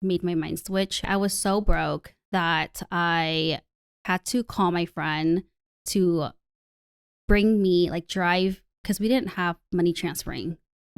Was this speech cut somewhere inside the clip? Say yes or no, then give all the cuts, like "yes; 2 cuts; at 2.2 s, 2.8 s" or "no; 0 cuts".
yes; 1 cut; at 1.1 s